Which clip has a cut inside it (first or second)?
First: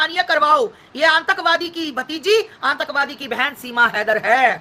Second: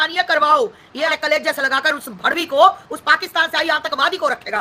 second